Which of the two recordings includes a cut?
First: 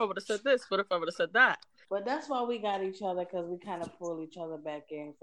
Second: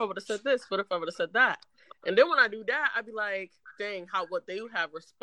first; 1 cut; at 1.7 s

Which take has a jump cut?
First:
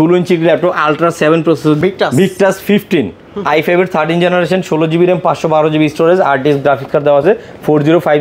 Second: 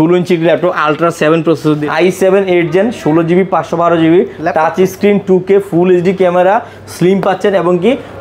second; 1 cut; at 1.8 s

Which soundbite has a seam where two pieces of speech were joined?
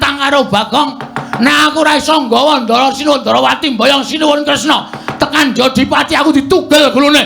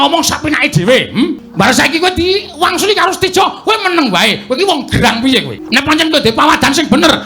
second; 2 cuts; at 1.4 s, 5.6 s

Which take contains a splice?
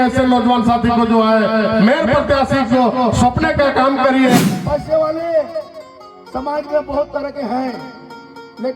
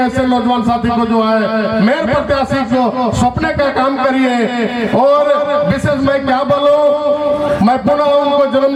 first; 1 cut; at 4.4 s

